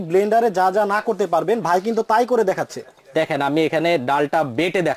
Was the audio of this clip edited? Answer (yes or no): no